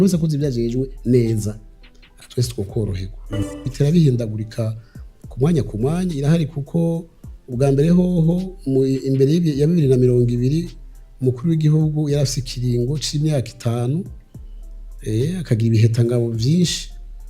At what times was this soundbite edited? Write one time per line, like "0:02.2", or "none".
0:03.7